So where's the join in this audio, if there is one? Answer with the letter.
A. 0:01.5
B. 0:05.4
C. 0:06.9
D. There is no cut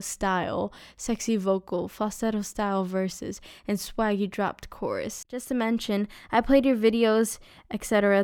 B